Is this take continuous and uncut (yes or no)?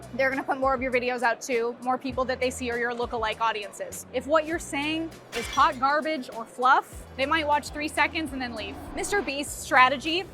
no